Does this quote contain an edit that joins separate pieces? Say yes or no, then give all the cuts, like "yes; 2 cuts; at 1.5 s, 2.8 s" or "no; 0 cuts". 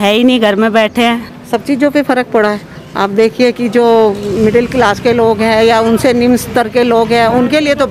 no; 0 cuts